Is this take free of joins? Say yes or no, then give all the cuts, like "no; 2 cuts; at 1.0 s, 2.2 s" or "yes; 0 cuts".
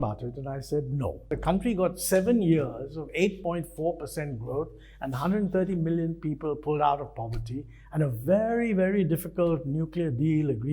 no; 1 cut; at 1.4 s